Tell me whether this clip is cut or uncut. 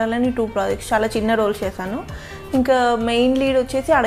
uncut